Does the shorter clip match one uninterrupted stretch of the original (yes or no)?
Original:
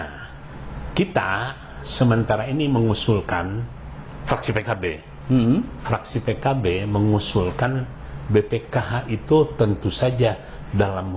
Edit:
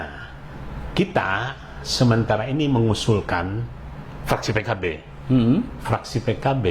yes